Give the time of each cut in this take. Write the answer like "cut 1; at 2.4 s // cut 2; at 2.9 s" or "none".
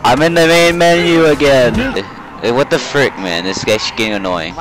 cut 1; at 2.0 s